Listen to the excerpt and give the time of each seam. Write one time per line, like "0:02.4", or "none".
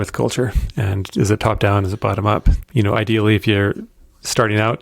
0:02.6

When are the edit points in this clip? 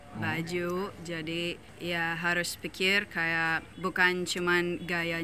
0:01.7
0:03.7

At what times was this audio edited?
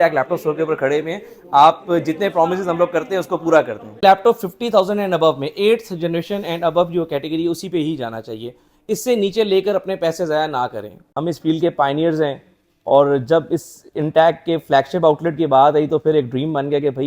0:03.9
0:11.2

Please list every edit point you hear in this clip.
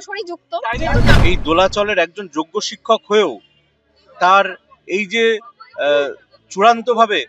0:01.1

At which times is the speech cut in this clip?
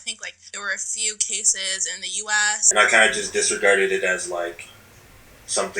0:02.6

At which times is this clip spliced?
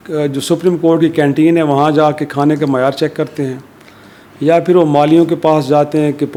none

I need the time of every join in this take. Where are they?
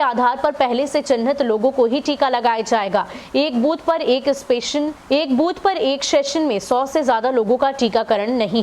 0:05.0

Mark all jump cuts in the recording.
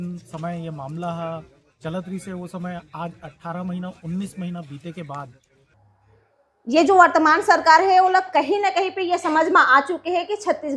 0:05.7

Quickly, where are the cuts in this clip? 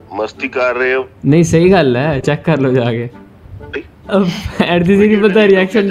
none

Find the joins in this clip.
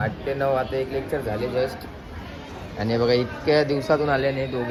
none

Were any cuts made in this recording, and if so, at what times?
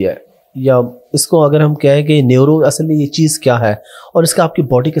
none

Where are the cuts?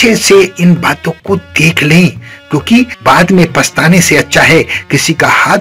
0:02.9

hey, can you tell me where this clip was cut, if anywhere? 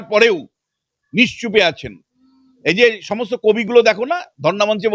none

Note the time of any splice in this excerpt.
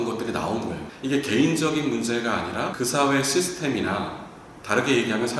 0:00.9
0:02.7

